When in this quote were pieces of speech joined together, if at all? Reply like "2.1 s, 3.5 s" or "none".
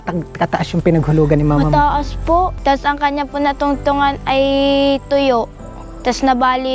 2.6 s